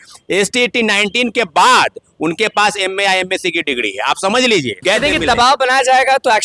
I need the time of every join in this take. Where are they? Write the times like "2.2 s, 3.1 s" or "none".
4.8 s